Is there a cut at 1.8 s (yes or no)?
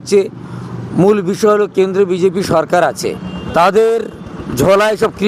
no